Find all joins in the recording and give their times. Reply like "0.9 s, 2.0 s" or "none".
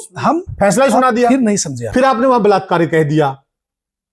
1.7 s